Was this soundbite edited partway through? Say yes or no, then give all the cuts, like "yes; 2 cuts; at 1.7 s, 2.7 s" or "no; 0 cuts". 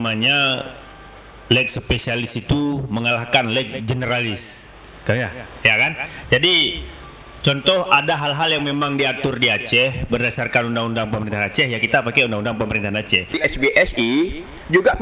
yes; 1 cut; at 13.4 s